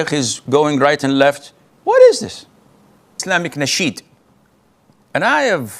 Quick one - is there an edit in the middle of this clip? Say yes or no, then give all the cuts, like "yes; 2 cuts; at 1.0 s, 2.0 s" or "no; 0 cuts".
yes; 1 cut; at 3.2 s